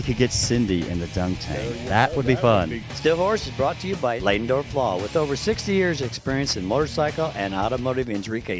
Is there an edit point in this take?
yes; 1 cut; at 2.8 s

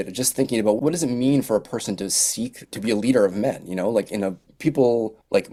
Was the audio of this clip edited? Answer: no; 0 cuts

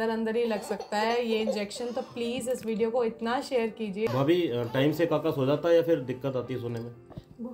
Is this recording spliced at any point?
yes; 1 cut; at 4.1 s

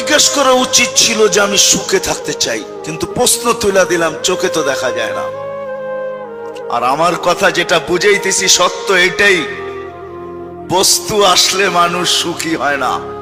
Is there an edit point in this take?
no; 0 cuts

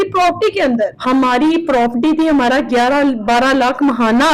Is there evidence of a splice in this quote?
yes; 1 cut; at 1.0 s

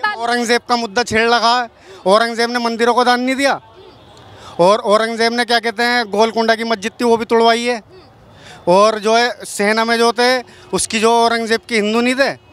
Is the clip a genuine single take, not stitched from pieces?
yes; 0 cuts

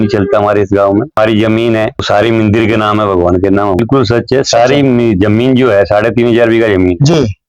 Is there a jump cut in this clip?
yes; 3 cuts; at 1.2 s, 2.0 s, 3.8 s

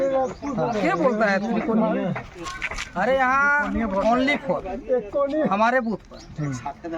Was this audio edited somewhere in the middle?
no; 0 cuts

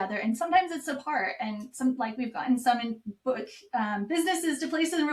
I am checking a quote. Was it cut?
no; 0 cuts

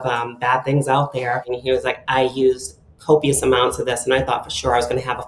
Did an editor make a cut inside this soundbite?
yes; 1 cut; at 1.5 s

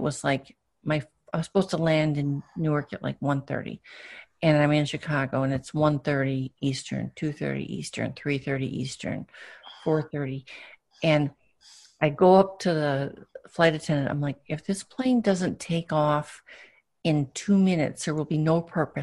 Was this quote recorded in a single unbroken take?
yes; 0 cuts

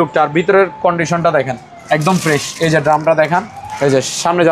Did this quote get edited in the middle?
yes; 1 cut; at 3.6 s

